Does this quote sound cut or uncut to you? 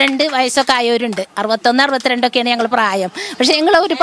uncut